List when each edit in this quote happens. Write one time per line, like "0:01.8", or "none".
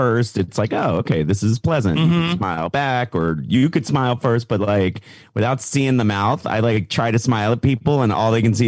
none

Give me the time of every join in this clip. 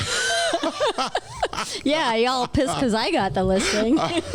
none

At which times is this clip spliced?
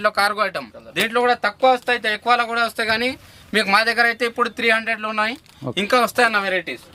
none

